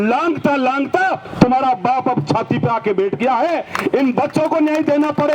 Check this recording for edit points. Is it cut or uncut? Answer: uncut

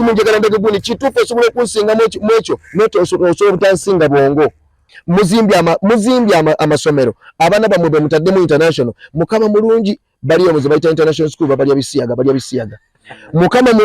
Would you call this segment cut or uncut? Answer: cut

